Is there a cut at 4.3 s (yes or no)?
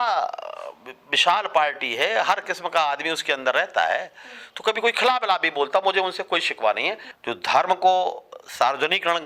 no